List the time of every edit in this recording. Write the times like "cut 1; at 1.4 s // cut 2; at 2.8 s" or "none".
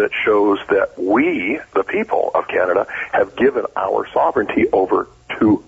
none